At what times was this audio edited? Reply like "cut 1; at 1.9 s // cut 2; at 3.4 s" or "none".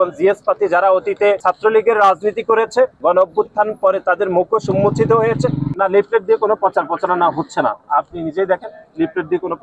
cut 1; at 1.4 s // cut 2; at 3.0 s // cut 3; at 5.7 s